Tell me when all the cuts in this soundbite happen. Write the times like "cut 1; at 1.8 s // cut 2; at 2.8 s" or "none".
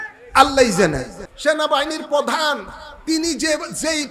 cut 1; at 1.2 s